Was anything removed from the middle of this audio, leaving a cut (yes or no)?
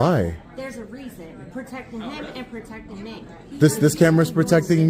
no